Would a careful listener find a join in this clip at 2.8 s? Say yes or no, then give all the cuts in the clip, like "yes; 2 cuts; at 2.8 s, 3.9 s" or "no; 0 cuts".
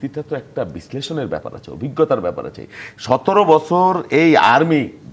no; 0 cuts